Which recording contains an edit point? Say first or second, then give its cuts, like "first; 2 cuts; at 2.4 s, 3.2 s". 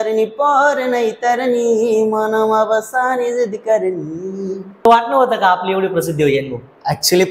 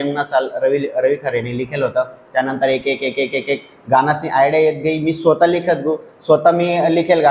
first; 1 cut; at 4.9 s